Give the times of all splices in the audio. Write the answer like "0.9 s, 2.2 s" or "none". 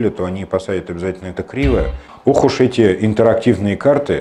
2.0 s